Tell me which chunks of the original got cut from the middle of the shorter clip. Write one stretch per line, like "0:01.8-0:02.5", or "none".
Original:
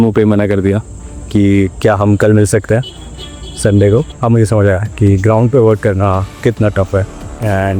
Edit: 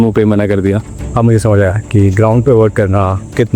0:01.1-0:04.1